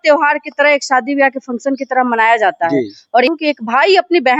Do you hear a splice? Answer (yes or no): yes